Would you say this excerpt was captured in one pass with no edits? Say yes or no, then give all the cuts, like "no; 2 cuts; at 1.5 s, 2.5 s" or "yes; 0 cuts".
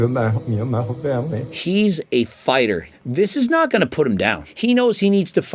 no; 3 cuts; at 1.4 s, 2.9 s, 4.5 s